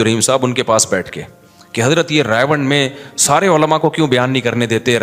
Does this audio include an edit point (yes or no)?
no